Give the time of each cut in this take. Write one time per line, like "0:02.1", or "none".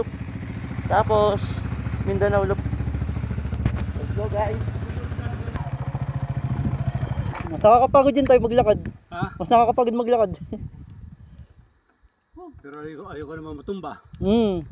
0:05.6